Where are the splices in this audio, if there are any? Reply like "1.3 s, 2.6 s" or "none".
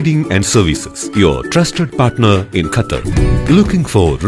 0.9 s